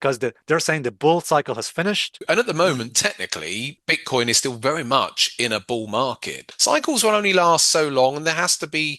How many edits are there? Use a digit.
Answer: 3